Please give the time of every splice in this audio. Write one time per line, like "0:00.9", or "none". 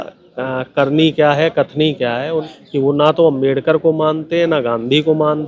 0:02.5